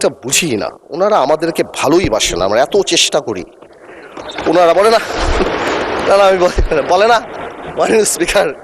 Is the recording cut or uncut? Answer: uncut